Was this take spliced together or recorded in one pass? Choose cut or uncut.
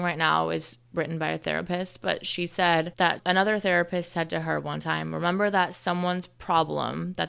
uncut